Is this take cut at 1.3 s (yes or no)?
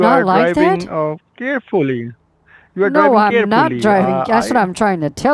no